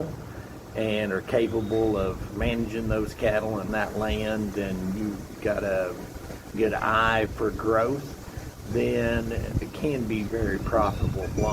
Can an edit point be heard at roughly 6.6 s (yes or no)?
yes